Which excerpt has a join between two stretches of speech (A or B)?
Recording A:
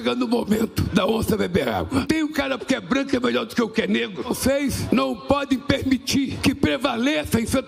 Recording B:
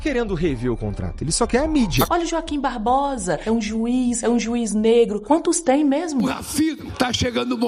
B